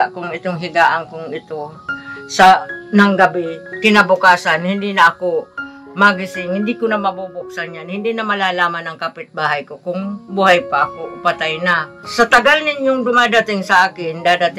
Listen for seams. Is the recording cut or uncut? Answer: cut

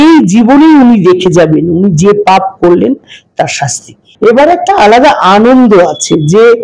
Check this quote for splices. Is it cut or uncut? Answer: cut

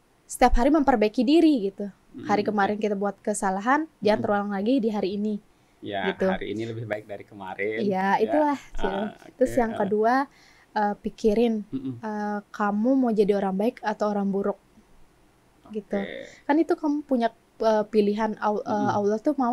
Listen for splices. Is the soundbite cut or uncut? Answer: uncut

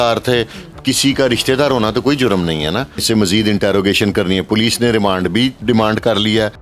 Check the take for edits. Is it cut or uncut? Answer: cut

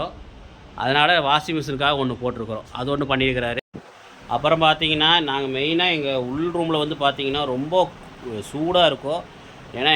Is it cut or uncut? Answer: cut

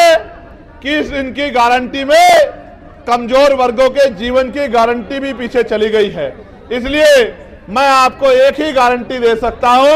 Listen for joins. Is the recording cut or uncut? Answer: uncut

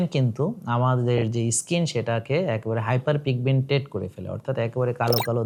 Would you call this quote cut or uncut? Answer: uncut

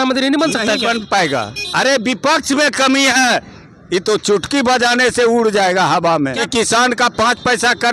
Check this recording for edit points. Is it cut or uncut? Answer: cut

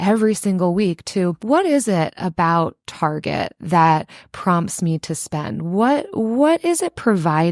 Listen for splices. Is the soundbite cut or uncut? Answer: cut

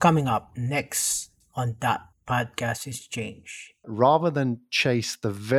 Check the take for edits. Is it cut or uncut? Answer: cut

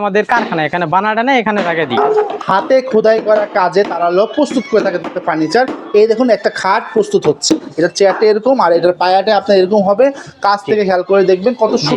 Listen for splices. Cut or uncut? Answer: cut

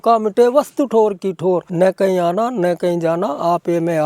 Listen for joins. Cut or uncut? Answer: cut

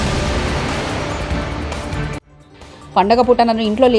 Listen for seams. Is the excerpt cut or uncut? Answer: cut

